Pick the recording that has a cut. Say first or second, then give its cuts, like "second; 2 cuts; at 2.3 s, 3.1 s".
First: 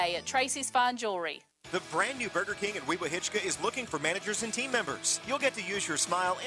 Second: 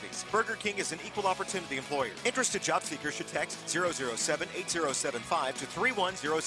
first; 1 cut; at 1.6 s